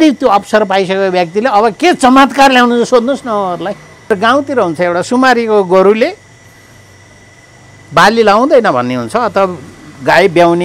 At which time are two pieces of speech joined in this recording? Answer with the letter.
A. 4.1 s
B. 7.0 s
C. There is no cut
A